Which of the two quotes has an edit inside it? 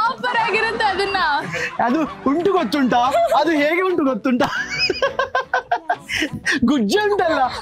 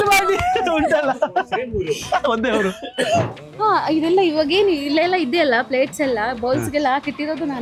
second; 1 cut; at 3.4 s

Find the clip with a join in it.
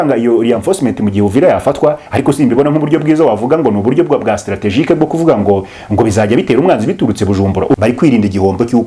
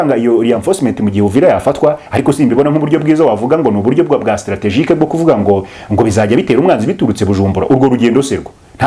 first; 1 cut; at 7.8 s

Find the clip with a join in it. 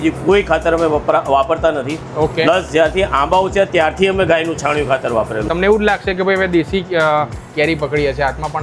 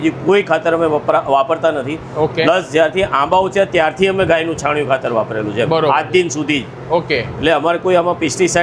first; 1 cut; at 5.5 s

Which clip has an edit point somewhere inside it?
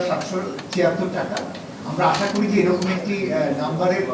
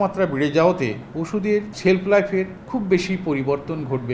second; 2 cuts; at 1.3 s, 2.6 s

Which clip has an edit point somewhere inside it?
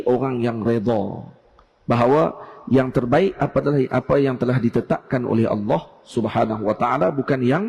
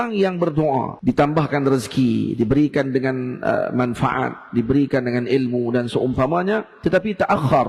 second; 1 cut; at 0.9 s

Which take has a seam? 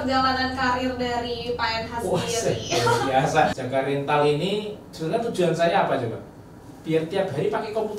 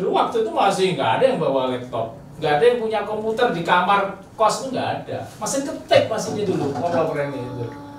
first; 1 cut; at 3.6 s

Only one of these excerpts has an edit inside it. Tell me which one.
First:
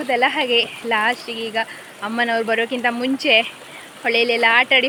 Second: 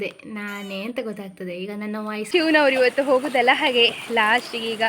second; 1 cut; at 2.2 s

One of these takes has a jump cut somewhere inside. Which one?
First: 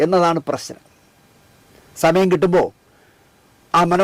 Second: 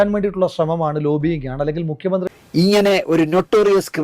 second; 1 cut; at 2.3 s

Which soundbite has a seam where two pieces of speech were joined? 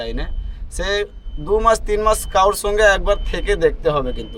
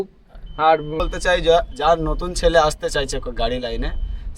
second; 1 cut; at 1.0 s

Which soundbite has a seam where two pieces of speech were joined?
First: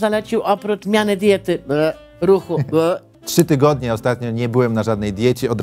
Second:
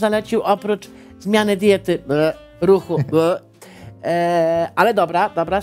first; 2 cuts; at 0.8 s, 3.1 s

